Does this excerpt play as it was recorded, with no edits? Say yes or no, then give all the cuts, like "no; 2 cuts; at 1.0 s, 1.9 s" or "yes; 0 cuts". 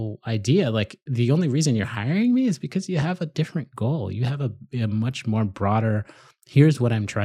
yes; 0 cuts